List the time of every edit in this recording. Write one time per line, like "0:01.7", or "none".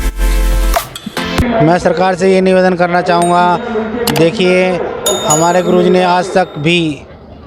0:01.4